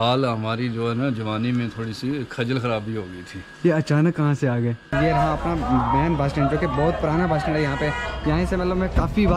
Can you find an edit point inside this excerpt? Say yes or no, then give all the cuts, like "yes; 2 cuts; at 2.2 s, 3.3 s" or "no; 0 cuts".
yes; 1 cut; at 4.9 s